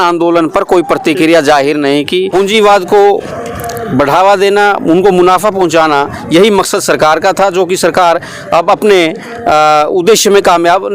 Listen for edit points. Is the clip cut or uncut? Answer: cut